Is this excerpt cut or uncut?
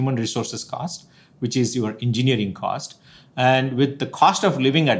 uncut